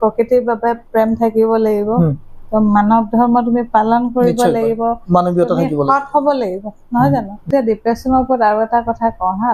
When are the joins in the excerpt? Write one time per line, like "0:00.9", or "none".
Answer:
0:07.5